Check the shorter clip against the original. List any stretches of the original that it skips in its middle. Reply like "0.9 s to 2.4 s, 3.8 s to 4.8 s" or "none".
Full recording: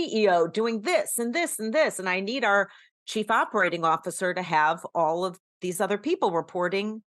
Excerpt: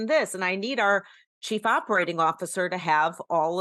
none